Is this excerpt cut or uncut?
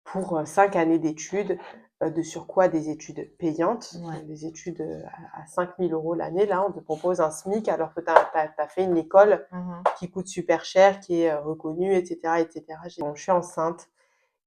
cut